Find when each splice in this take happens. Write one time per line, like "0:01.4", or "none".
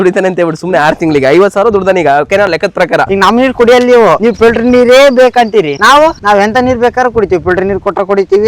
0:03.1